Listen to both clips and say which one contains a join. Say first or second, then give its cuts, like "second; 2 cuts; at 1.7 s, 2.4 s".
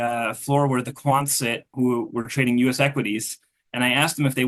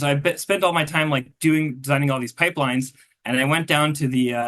first; 1 cut; at 1.7 s